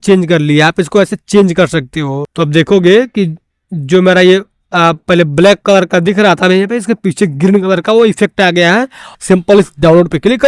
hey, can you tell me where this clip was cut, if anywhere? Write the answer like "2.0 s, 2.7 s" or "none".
2.2 s, 9.1 s